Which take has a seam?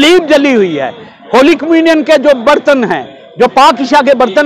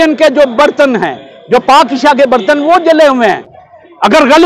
second; 1 cut; at 3.5 s

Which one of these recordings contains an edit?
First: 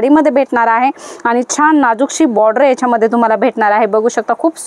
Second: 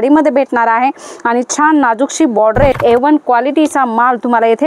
second; 1 cut; at 2.8 s

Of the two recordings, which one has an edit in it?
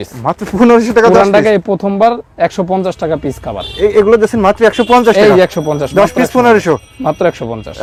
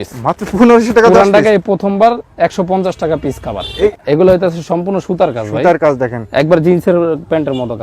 second; 1 cut; at 3.9 s

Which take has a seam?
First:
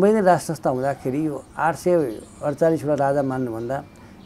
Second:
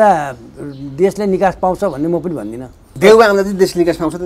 second; 1 cut; at 2.9 s

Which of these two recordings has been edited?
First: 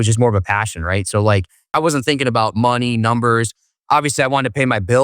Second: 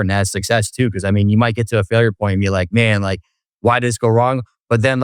first; 1 cut; at 1.7 s

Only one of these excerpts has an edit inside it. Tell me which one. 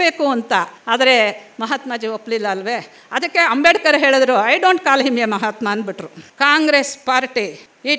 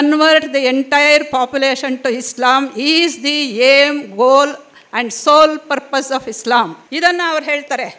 first; 1 cut; at 6.2 s

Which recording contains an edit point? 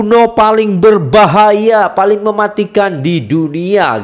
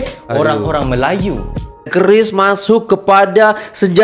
second; 1 cut; at 1.9 s

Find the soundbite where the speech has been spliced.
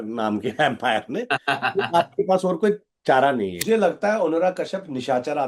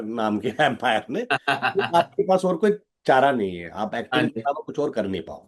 first; 1 cut; at 3.6 s

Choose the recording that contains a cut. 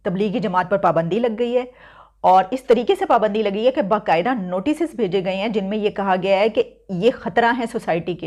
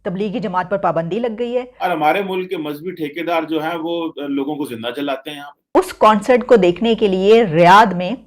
second; 2 cuts; at 1.7 s, 5.7 s

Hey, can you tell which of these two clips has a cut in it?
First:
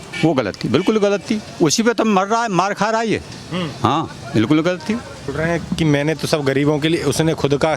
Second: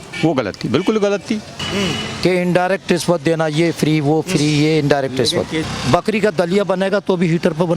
second; 2 cuts; at 1.5 s, 5.6 s

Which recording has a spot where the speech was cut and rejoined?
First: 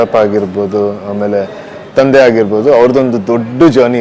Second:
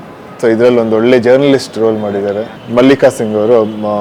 second; 1 cut; at 2.5 s

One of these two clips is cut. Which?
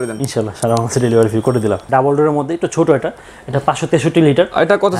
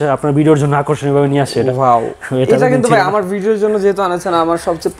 first; 1 cut; at 1.8 s

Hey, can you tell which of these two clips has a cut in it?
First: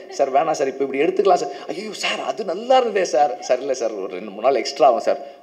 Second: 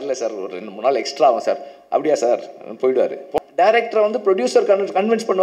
second; 1 cut; at 3.3 s

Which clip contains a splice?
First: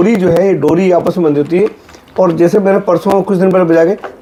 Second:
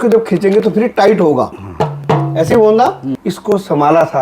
second; 1 cut; at 3.1 s

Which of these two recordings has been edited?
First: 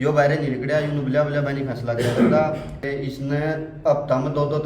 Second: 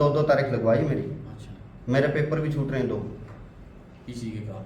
first; 1 cut; at 2.8 s

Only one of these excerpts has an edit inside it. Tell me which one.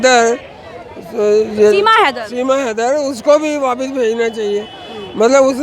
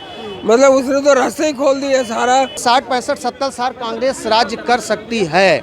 second; 1 cut; at 2.6 s

